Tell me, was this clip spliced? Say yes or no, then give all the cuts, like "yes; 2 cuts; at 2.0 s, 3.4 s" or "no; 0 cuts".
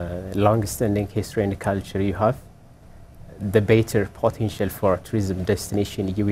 no; 0 cuts